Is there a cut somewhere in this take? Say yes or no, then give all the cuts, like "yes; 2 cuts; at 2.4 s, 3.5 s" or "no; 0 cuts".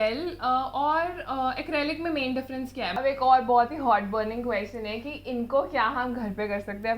yes; 1 cut; at 2.9 s